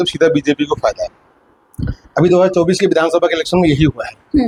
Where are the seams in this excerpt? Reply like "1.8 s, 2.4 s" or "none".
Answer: none